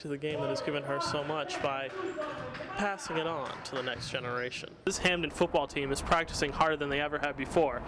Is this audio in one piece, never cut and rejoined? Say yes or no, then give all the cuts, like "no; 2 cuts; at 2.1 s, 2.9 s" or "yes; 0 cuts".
no; 1 cut; at 4.9 s